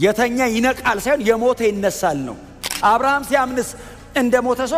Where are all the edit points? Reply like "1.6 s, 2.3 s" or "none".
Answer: 2.6 s